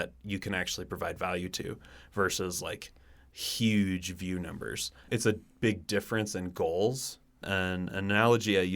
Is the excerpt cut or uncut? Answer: cut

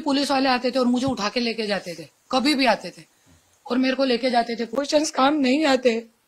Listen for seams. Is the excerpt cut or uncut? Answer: cut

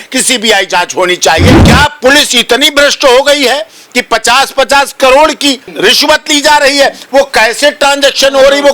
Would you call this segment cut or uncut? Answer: cut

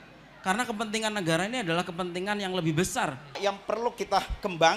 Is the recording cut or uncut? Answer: cut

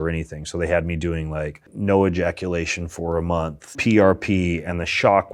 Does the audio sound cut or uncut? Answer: cut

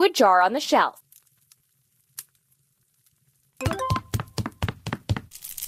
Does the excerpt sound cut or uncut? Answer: uncut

